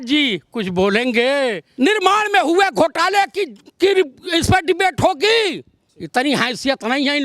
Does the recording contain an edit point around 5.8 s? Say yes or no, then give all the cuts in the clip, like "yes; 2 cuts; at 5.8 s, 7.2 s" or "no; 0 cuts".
no; 1 cut; at 1.6 s